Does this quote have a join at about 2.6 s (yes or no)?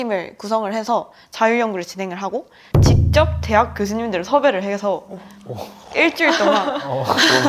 yes